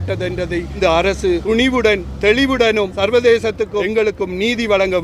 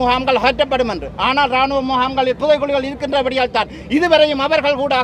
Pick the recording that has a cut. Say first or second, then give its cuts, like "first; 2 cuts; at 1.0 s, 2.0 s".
first; 4 cuts; at 0.8 s, 1.4 s, 2.9 s, 3.9 s